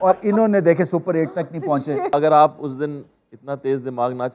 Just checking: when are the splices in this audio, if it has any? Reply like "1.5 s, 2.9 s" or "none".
2.1 s